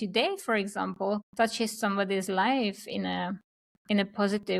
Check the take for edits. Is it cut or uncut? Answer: cut